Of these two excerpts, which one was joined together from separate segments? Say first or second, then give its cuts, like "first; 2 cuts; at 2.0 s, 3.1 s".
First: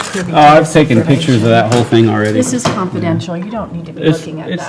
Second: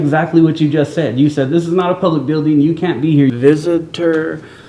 second; 1 cut; at 3.3 s